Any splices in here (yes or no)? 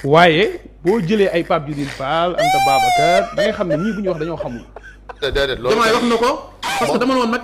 yes